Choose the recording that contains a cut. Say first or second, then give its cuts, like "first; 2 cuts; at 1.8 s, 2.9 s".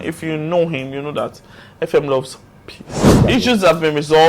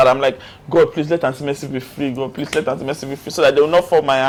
first; 1 cut; at 3.2 s